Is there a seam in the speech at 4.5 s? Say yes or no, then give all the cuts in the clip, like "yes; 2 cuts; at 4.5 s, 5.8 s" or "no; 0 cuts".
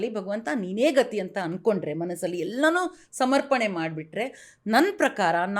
no; 0 cuts